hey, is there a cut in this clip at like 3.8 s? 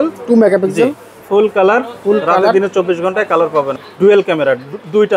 yes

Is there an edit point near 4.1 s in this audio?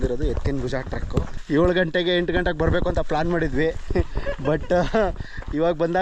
no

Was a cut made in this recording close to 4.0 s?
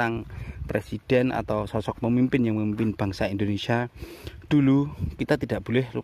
no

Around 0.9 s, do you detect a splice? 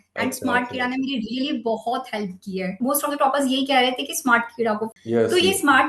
no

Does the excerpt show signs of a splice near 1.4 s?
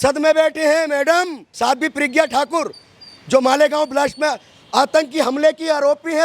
yes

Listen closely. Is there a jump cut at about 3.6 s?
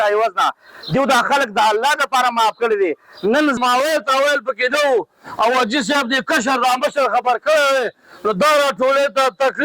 yes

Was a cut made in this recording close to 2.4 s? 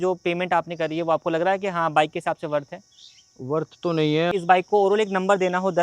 no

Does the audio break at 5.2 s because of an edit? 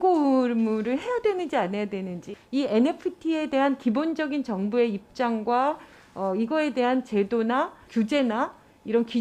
no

